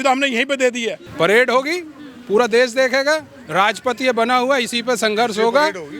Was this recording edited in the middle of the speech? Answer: yes; 1 cut; at 1.0 s

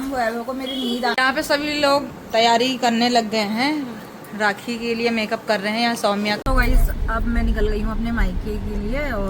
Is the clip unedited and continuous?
no; 2 cuts; at 1.1 s, 6.4 s

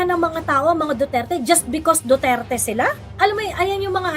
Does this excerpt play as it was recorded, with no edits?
yes; 0 cuts

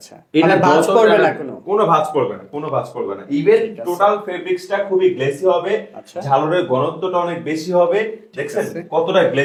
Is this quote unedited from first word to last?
yes; 0 cuts

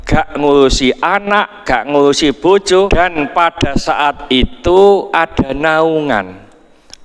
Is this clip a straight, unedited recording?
no; 1 cut; at 2.9 s

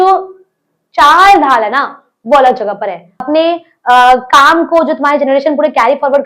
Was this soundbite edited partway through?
yes; 1 cut; at 3.3 s

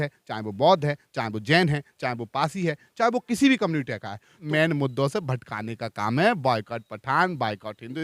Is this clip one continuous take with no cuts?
no; 1 cut; at 4.5 s

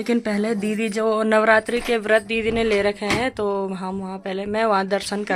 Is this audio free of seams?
yes; 0 cuts

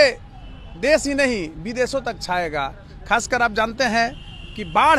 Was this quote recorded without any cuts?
yes; 0 cuts

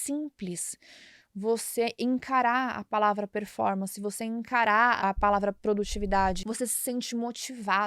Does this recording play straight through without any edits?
no; 2 cuts; at 5.0 s, 6.4 s

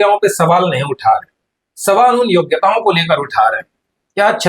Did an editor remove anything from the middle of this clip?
no; 0 cuts

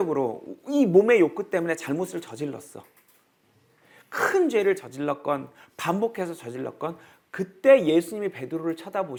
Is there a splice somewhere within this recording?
no; 0 cuts

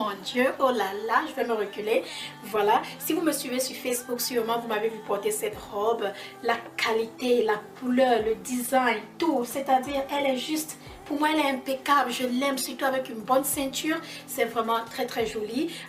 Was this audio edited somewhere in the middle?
yes; 1 cut; at 8.1 s

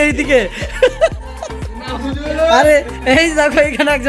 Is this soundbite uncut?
yes; 0 cuts

